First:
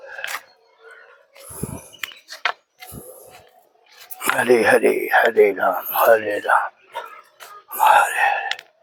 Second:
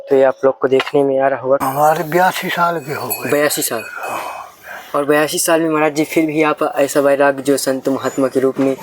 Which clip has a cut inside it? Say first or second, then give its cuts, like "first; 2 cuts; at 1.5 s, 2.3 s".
second; 1 cut; at 1.6 s